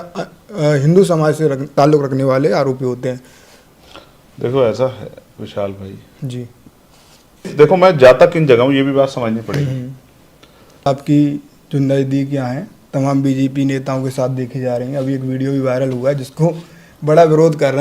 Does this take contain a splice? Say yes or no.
yes